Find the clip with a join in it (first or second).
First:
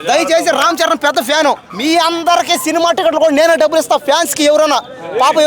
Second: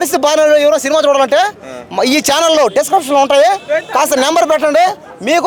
first